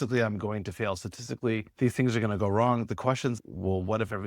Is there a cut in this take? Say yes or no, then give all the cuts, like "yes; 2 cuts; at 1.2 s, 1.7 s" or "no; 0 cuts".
yes; 1 cut; at 3.4 s